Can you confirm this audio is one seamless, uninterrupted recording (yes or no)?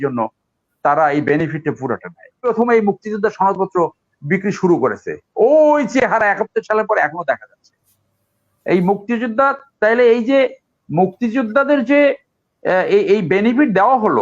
no